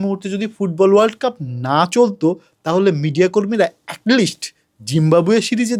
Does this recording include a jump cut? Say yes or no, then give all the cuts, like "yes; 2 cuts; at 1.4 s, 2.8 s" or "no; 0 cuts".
no; 0 cuts